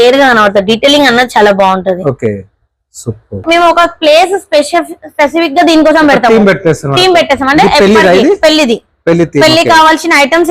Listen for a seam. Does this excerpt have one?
yes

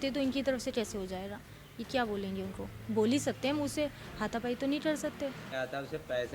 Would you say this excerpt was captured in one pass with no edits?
no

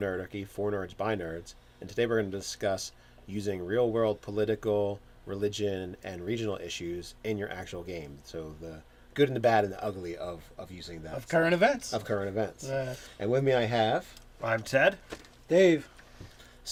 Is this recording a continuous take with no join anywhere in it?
yes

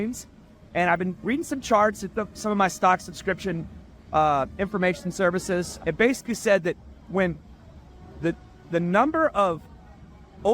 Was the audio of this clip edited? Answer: yes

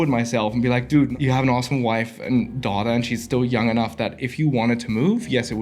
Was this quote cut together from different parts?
yes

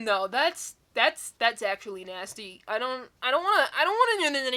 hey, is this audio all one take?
yes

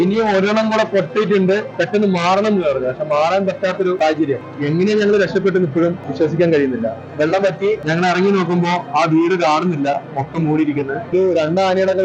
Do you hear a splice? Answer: yes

